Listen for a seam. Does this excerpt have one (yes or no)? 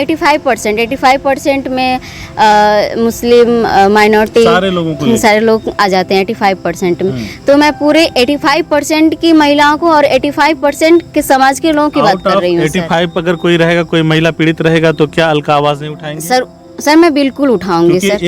no